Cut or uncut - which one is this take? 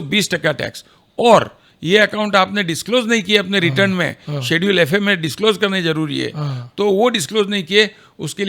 uncut